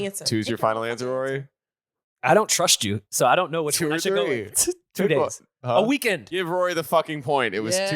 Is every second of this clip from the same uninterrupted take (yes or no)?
no